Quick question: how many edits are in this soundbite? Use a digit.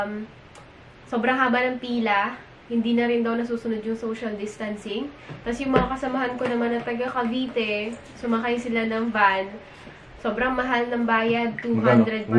0